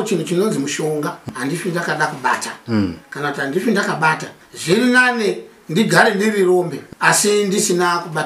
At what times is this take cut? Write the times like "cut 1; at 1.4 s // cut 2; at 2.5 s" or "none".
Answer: cut 1; at 1.3 s // cut 2; at 4.3 s // cut 3; at 6.8 s